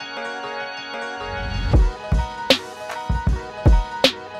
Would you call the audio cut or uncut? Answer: cut